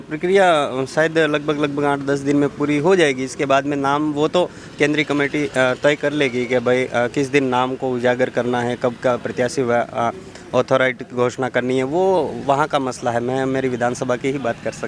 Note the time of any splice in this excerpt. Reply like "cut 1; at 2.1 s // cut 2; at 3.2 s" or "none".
none